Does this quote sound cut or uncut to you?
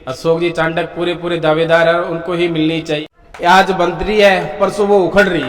cut